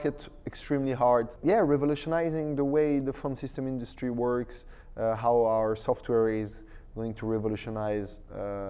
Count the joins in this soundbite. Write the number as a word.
one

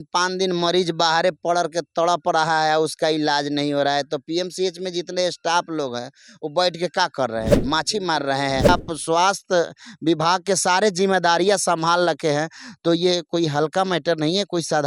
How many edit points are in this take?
one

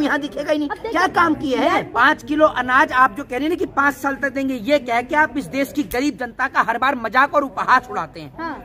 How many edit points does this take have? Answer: one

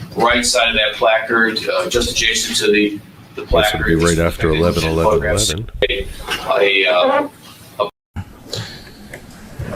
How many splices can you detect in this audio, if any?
one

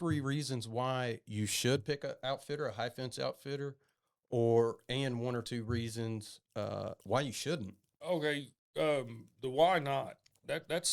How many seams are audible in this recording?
one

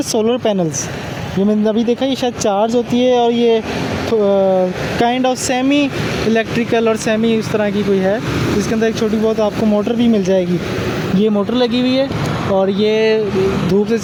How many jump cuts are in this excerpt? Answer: zero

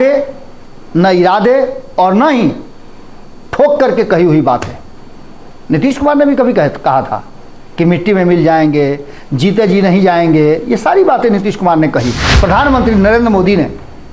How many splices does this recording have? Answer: one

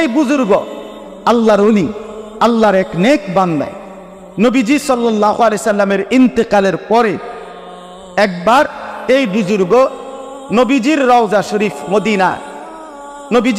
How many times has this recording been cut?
zero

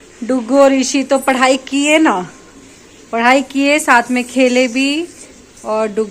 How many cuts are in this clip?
zero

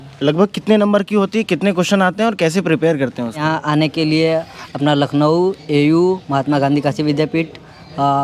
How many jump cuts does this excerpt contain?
one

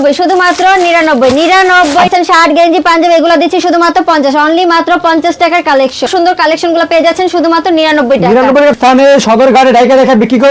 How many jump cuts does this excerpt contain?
three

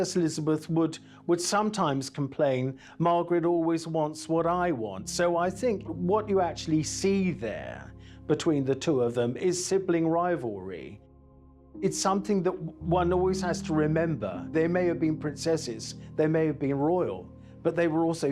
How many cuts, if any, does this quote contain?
one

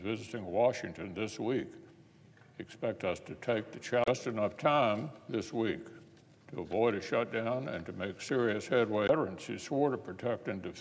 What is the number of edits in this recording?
zero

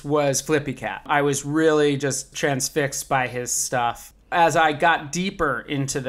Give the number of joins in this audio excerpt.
three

